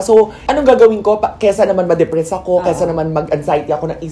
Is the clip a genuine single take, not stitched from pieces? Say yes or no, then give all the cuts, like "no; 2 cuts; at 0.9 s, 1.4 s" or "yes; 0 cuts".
yes; 0 cuts